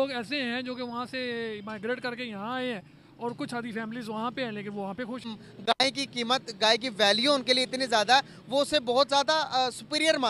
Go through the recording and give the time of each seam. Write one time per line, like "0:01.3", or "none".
0:05.2